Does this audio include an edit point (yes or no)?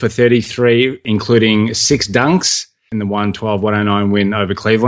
yes